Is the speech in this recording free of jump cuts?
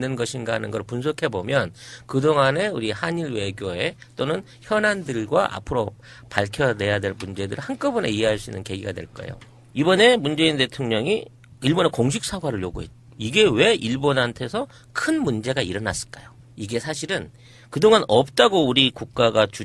yes; 0 cuts

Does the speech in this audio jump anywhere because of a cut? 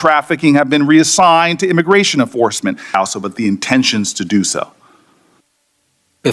yes; 1 cut; at 2.9 s

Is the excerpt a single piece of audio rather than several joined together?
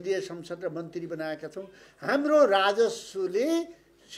yes; 0 cuts

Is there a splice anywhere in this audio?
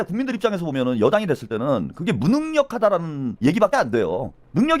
yes; 1 cut; at 3.3 s

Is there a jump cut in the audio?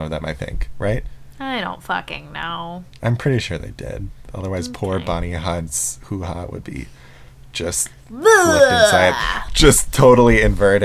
no; 0 cuts

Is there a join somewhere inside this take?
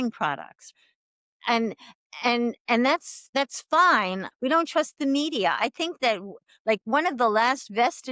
yes; 2 cuts; at 0.9 s, 4.3 s

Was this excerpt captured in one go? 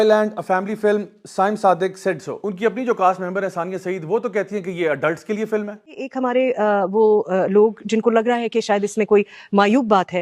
no; 1 cut; at 2.5 s

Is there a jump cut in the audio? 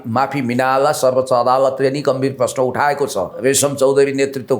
yes; 1 cut; at 3.4 s

